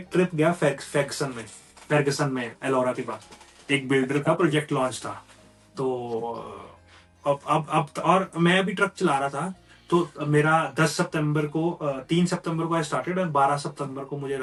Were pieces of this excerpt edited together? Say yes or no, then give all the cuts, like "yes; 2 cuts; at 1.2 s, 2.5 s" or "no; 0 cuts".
no; 0 cuts